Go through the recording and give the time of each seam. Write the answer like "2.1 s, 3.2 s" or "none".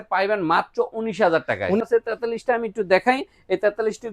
1.8 s